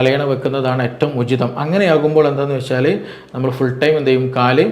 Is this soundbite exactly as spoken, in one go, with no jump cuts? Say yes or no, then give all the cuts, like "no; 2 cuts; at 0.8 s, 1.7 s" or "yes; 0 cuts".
yes; 0 cuts